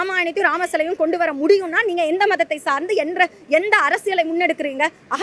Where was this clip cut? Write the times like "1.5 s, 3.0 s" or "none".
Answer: none

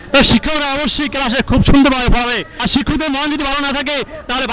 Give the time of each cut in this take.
2.5 s

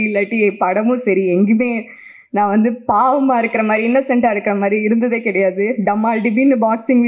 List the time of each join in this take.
none

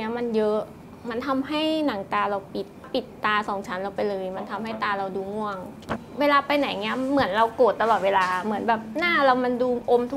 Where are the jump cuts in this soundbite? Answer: 2.9 s, 6.0 s

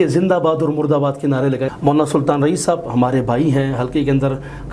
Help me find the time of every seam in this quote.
1.7 s

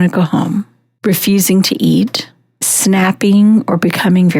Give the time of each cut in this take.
none

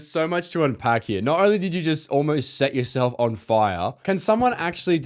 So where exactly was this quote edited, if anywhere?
4.0 s

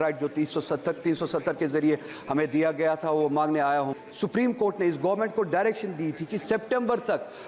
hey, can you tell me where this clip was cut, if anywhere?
3.9 s

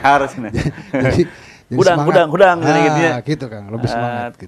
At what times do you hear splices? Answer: none

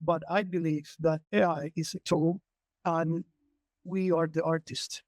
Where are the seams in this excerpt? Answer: 1.2 s

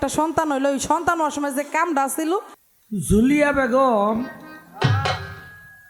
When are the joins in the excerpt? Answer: 2.6 s

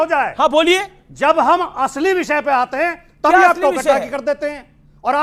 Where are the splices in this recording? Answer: none

